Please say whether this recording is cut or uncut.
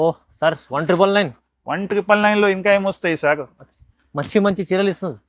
uncut